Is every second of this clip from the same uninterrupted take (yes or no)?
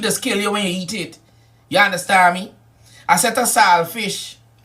no